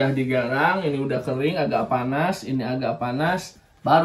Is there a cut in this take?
no; 0 cuts

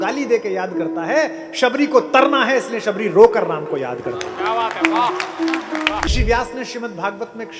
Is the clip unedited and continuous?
no; 1 cut; at 6.1 s

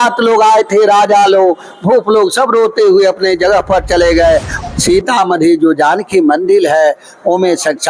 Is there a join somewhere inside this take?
yes; 1 cut; at 4.6 s

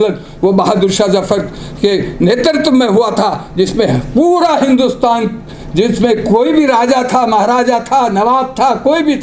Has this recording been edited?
no; 0 cuts

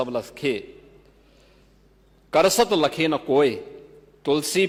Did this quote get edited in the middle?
no; 0 cuts

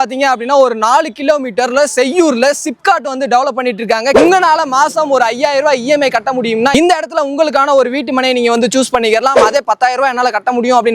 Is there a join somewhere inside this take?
yes; 1 cut; at 4.1 s

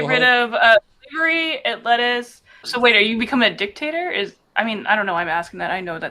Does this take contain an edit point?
yes; 1 cut; at 2.7 s

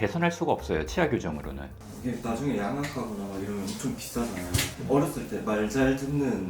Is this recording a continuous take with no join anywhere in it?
no; 2 cuts; at 1.7 s, 4.7 s

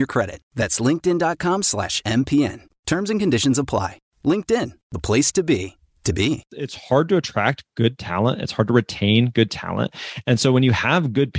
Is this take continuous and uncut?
no; 1 cut; at 6.5 s

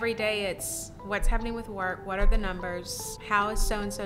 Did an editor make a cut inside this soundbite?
yes; 1 cut; at 3.1 s

